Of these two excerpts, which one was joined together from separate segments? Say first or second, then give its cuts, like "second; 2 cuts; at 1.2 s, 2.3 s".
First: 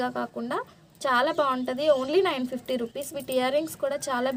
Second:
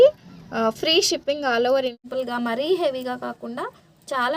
second; 1 cut; at 2.0 s